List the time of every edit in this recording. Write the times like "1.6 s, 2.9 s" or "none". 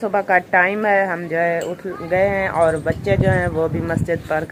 none